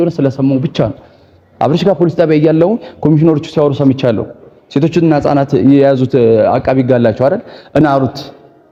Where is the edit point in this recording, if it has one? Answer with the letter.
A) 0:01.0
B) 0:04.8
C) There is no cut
C